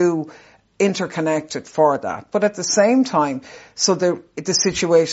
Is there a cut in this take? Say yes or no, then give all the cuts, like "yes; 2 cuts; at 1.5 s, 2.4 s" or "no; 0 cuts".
no; 0 cuts